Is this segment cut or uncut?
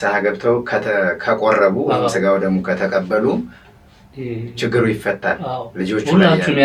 uncut